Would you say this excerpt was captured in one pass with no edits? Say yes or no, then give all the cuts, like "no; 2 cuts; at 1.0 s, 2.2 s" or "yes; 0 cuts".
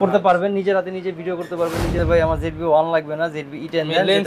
no; 1 cut; at 2.0 s